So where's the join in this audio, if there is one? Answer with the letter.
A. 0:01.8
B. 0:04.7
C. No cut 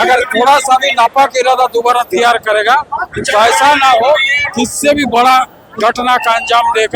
C